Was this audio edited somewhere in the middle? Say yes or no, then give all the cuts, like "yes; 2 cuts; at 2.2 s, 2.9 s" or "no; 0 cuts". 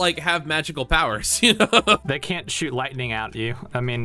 no; 0 cuts